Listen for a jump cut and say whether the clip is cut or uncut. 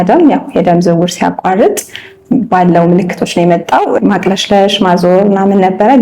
cut